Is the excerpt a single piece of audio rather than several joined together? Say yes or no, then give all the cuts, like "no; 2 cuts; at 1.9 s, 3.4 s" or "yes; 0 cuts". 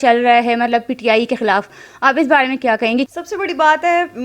yes; 0 cuts